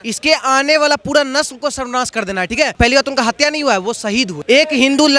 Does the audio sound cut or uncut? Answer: cut